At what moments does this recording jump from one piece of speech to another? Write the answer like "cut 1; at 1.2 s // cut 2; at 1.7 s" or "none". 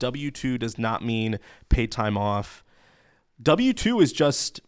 none